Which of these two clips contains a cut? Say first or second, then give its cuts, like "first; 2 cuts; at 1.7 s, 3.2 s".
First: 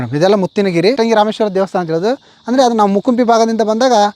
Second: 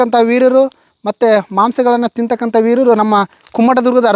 first; 1 cut; at 1.0 s